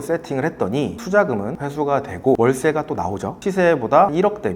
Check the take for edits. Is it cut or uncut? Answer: cut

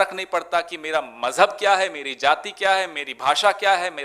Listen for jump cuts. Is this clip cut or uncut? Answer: uncut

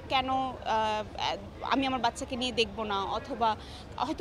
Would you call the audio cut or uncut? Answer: uncut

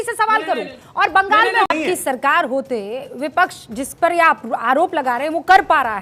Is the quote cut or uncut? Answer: cut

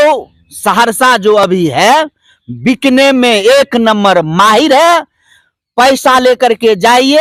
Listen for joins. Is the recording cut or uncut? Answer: uncut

